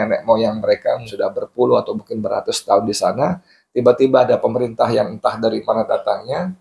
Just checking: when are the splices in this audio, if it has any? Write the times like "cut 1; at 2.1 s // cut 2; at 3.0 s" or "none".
cut 1; at 1.1 s